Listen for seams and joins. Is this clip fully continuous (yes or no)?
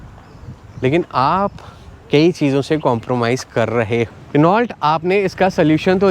no